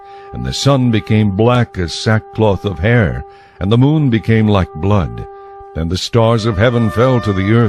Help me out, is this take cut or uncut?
cut